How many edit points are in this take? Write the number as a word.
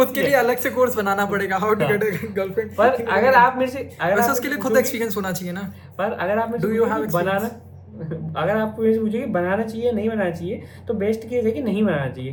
zero